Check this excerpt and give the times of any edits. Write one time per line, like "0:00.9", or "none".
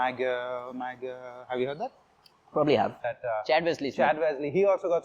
0:03.1